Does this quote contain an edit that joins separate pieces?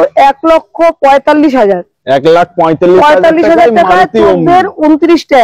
no; 0 cuts

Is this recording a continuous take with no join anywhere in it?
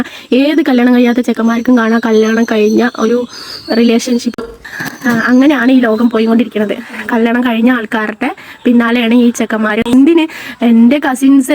no; 2 cuts; at 4.6 s, 9.9 s

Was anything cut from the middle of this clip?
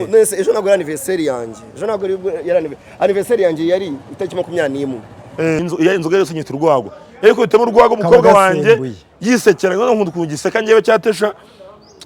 yes; 1 cut; at 5.6 s

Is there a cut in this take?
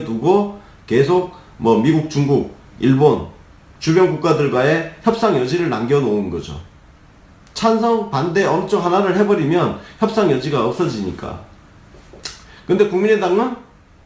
no; 0 cuts

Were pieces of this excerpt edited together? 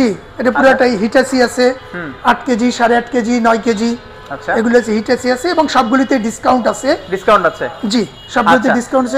no; 0 cuts

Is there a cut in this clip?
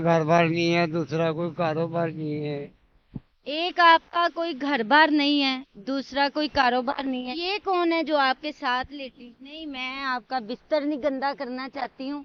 no; 0 cuts

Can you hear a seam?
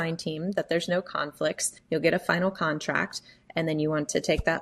yes; 1 cut; at 1.7 s

